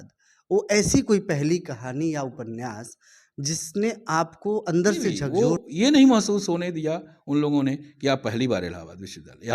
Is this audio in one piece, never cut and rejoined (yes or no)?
no